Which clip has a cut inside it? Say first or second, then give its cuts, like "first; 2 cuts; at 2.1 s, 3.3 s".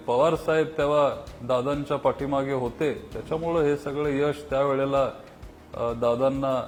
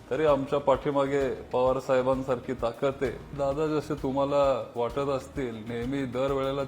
second; 1 cut; at 3.3 s